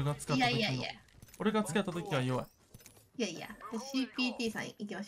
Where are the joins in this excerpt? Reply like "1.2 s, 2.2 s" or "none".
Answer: none